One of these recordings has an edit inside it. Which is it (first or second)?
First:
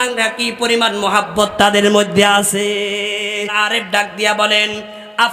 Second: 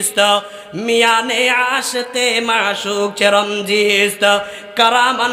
first